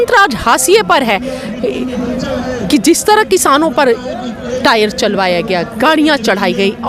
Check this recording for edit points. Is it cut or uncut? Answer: uncut